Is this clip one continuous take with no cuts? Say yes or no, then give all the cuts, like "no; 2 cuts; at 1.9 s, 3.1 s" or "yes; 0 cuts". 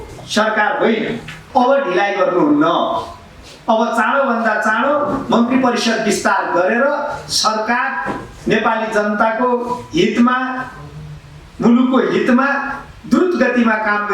no; 1 cut; at 1.4 s